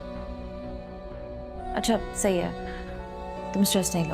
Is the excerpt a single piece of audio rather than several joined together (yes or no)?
no